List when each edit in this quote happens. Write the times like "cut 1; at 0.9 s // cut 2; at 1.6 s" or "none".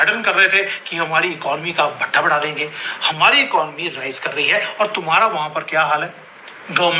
none